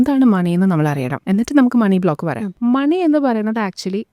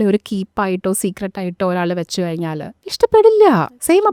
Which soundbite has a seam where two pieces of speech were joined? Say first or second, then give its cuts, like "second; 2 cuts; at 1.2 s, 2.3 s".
first; 2 cuts; at 1.1 s, 2.5 s